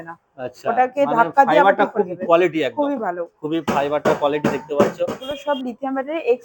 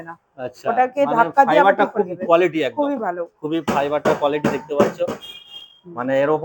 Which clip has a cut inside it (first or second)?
first